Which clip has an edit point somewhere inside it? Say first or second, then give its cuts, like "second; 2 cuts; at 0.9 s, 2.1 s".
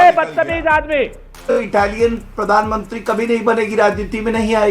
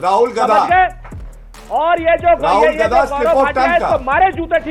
first; 1 cut; at 1.6 s